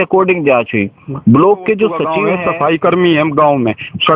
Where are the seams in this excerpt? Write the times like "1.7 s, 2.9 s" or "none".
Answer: 2.2 s

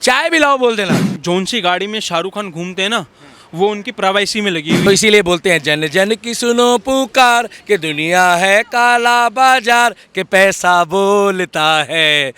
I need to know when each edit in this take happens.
1.1 s, 4.9 s

